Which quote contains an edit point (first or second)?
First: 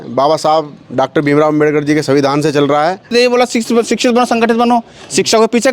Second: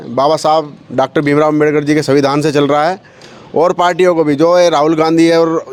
first